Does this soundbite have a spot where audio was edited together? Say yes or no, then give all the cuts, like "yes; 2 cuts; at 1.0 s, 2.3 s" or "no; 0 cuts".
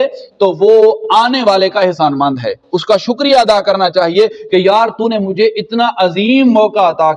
no; 0 cuts